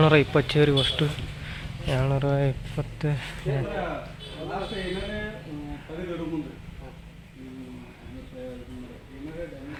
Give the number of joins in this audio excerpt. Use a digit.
0